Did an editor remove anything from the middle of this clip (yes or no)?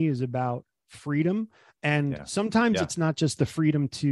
no